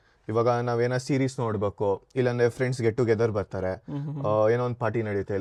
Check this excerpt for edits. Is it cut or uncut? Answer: uncut